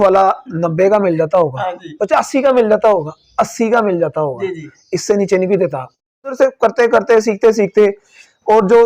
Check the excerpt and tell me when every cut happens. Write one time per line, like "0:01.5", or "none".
0:06.0